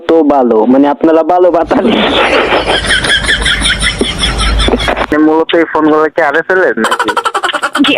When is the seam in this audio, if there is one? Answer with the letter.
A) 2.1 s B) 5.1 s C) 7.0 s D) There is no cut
B